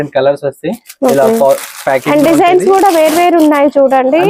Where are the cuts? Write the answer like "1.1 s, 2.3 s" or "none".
none